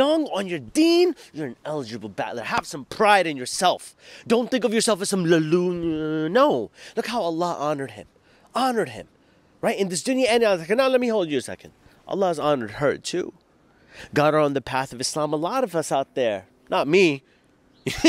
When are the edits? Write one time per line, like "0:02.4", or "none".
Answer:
none